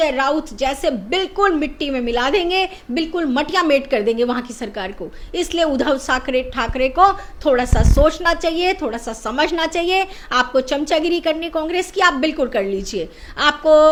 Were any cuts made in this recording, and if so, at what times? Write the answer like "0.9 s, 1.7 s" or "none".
none